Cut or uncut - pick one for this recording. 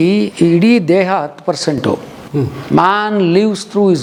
uncut